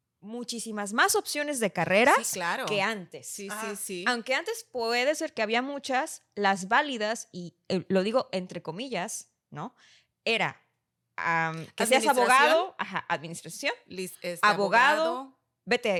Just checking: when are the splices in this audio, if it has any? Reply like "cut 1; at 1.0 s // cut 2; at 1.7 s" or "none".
none